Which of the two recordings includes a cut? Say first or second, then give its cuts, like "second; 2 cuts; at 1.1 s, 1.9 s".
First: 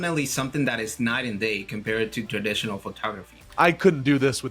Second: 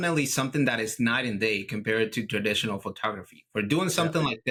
first; 1 cut; at 3.4 s